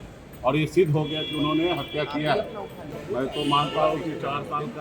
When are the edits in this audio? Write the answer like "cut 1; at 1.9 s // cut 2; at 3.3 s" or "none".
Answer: cut 1; at 3.0 s